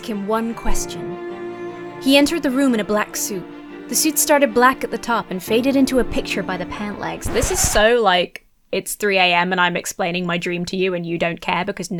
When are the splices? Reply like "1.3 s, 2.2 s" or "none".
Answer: none